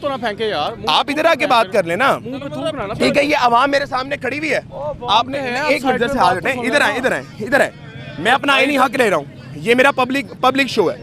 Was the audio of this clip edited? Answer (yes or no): no